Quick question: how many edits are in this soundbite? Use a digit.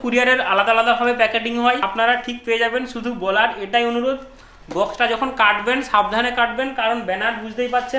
1